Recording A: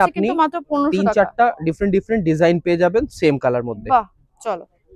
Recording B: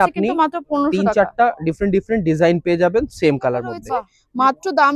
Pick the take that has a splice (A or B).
B